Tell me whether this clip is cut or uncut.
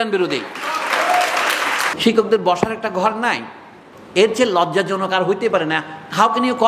cut